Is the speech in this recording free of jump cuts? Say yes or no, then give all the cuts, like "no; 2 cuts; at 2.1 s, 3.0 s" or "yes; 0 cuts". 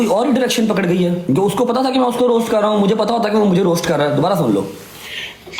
yes; 0 cuts